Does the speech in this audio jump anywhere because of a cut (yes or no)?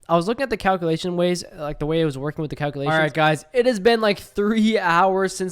yes